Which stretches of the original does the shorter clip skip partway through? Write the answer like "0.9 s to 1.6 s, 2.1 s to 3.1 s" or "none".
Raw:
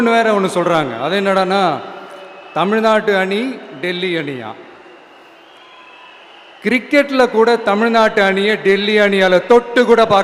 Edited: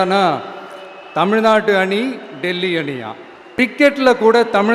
5.1 s to 6.8 s